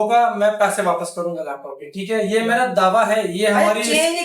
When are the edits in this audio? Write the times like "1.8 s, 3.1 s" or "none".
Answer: none